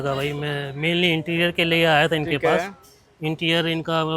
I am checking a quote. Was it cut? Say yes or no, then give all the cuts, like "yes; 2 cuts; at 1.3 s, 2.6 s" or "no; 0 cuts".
no; 0 cuts